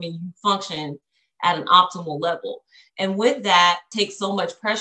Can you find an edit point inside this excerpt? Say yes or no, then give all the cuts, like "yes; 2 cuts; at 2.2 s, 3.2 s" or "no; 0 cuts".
yes; 1 cut; at 3.9 s